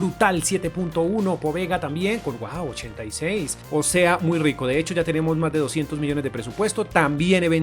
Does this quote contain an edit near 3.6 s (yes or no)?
yes